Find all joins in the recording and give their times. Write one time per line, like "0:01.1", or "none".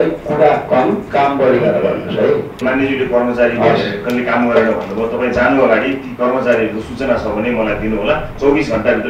0:02.6